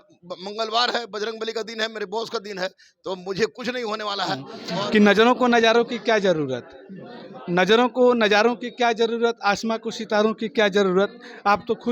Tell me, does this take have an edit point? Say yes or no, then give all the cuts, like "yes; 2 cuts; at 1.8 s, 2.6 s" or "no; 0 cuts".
yes; 1 cut; at 4.5 s